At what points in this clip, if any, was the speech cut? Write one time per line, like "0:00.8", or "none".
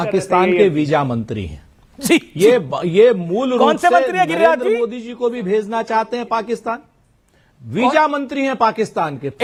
none